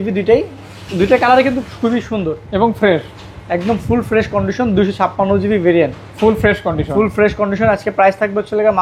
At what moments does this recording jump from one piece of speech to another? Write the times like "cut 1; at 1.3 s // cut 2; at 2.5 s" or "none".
none